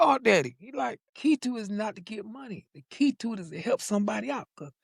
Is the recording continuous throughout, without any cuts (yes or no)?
no